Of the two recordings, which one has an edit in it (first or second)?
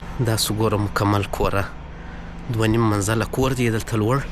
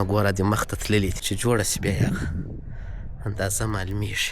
second